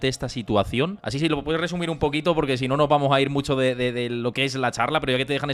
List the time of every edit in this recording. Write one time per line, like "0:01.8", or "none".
none